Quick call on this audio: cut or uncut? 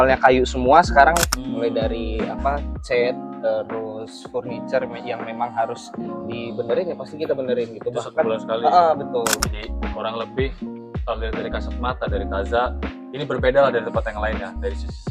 cut